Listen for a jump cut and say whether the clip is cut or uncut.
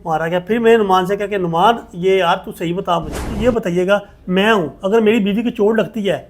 cut